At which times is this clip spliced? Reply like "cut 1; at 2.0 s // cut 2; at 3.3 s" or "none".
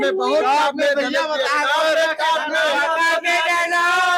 none